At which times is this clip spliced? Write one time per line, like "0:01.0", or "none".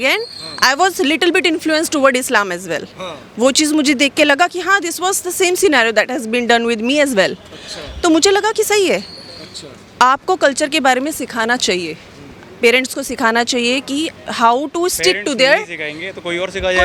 none